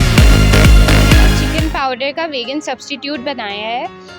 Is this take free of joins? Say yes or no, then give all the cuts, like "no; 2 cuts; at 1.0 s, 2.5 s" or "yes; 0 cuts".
no; 1 cut; at 1.5 s